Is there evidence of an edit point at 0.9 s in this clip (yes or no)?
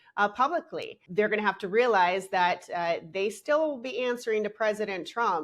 yes